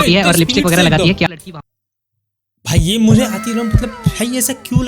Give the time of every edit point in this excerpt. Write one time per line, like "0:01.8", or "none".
0:01.3